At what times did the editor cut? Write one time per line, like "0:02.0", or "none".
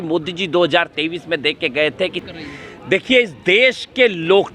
0:02.2